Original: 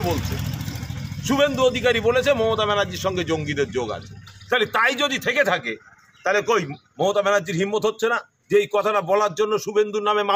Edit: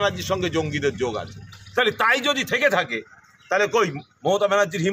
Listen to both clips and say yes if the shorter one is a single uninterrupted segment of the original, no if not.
yes